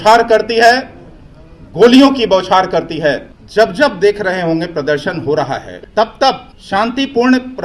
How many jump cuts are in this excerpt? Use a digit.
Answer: 3